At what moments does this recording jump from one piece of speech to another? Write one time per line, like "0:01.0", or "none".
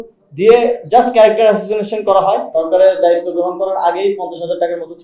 0:02.5